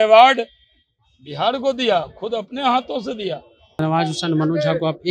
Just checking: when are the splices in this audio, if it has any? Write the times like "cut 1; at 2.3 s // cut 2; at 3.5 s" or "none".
cut 1; at 3.7 s